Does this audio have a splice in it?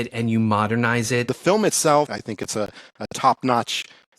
yes; 2 cuts; at 1.3 s, 2.2 s

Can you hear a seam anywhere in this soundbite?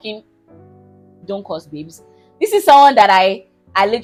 no; 0 cuts

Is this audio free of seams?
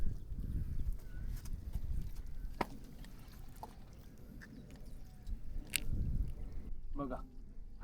no; 1 cut; at 6.7 s

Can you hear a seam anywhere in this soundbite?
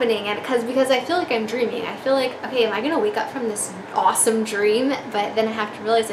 no; 0 cuts

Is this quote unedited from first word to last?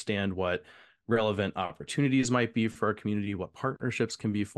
yes; 0 cuts

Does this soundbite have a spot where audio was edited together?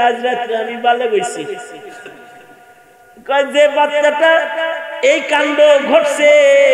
no; 0 cuts

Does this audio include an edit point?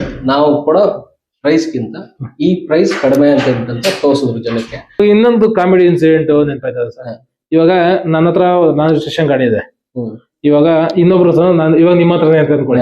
yes; 1 cut; at 5.0 s

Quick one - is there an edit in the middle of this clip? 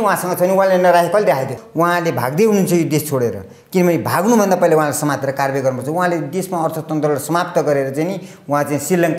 yes; 1 cut; at 1.6 s

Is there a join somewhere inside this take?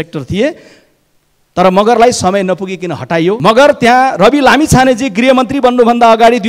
yes; 1 cut; at 3.4 s

